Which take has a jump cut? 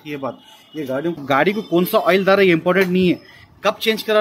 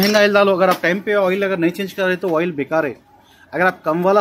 first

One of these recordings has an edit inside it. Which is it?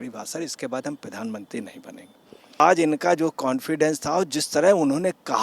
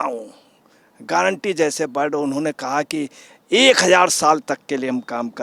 first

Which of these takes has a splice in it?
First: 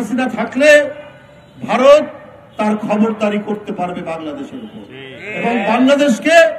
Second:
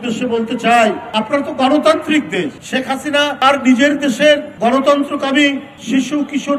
second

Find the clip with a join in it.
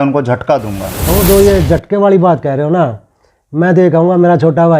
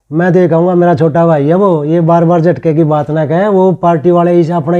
first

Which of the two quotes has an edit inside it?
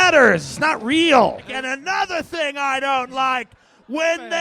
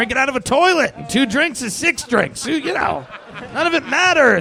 first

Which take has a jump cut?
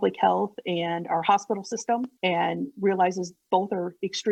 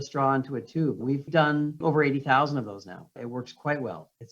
second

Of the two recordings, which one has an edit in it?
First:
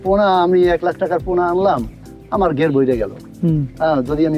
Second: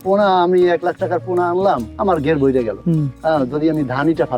second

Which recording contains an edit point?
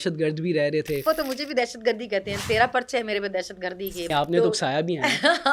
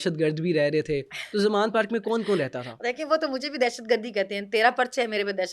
first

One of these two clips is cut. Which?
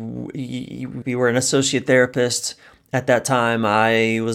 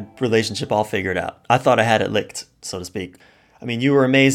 first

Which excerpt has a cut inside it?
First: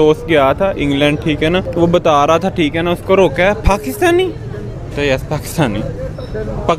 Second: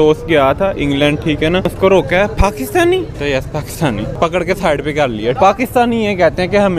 second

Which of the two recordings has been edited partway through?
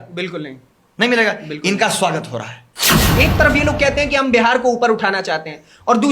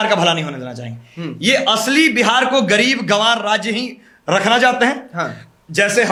first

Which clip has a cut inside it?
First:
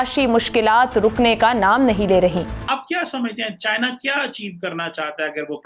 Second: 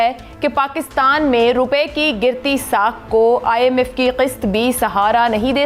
first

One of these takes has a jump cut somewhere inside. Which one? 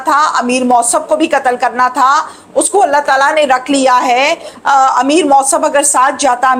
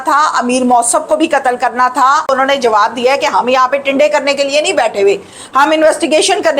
second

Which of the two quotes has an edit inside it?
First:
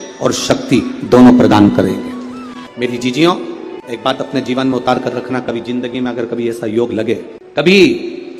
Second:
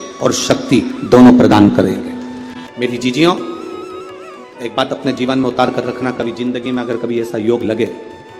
first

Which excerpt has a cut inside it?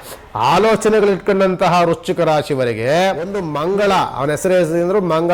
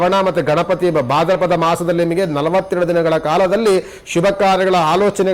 first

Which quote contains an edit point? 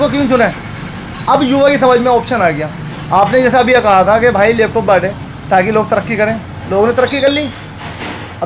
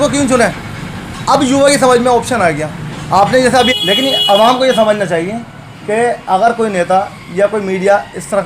second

